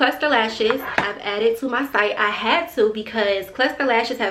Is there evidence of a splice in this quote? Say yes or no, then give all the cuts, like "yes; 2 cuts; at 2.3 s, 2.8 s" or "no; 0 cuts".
no; 0 cuts